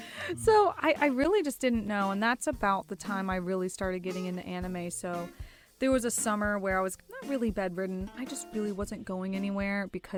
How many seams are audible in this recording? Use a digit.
0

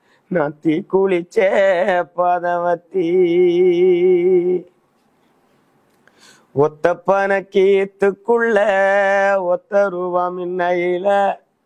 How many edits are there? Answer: 0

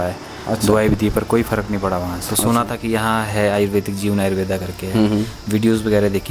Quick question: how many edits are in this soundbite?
1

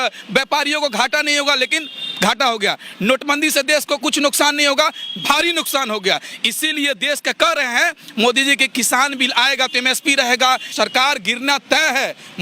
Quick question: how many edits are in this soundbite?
1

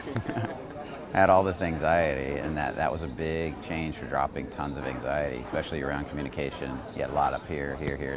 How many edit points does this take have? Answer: 0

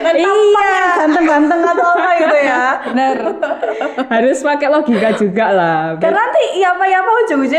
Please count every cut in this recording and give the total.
0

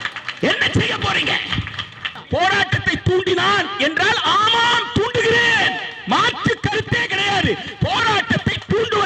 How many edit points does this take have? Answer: 1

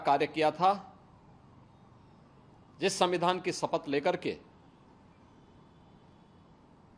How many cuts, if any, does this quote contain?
0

